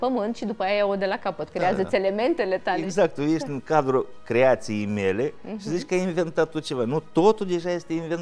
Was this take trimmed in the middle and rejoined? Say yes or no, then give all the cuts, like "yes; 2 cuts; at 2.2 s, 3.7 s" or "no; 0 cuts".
yes; 1 cut; at 2.9 s